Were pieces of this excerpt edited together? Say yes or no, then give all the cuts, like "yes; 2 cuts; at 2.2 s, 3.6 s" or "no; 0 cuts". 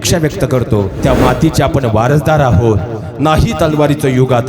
yes; 1 cut; at 1.0 s